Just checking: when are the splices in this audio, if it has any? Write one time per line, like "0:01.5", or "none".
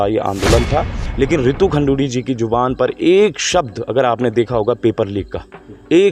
0:01.0